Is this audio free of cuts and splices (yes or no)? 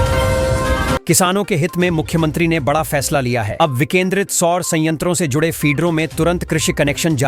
no